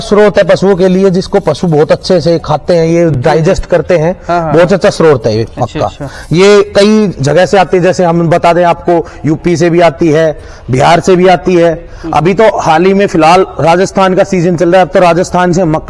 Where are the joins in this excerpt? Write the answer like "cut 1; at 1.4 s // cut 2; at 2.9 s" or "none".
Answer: none